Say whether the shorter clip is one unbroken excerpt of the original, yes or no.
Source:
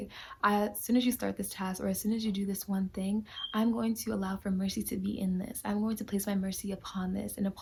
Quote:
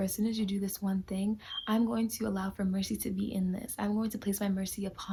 yes